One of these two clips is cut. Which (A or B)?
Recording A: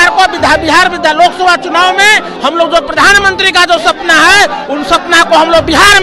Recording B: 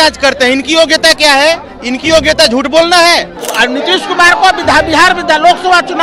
B